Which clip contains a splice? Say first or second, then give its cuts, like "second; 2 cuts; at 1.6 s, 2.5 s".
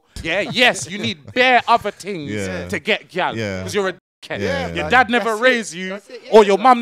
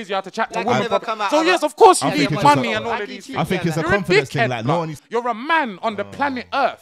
second; 1 cut; at 5.0 s